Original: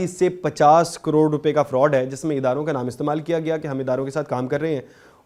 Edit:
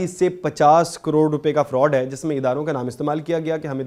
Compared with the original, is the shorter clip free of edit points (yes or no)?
yes